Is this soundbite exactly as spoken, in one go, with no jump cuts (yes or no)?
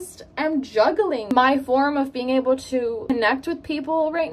no